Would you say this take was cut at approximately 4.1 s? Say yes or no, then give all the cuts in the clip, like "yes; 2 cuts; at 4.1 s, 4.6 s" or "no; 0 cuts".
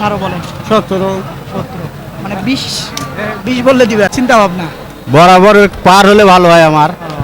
yes; 1 cut; at 4.1 s